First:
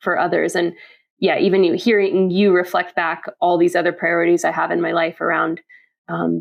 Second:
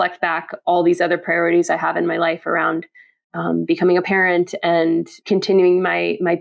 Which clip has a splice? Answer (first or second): second